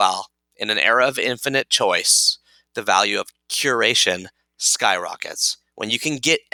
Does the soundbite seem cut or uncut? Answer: uncut